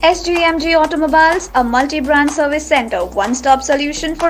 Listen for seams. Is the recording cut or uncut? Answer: uncut